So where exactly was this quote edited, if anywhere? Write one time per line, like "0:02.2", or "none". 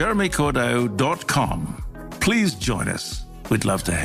none